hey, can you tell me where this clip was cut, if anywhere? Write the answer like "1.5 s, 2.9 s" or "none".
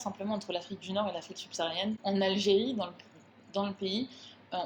2.0 s